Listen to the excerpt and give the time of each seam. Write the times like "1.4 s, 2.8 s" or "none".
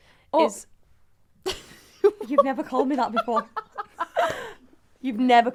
none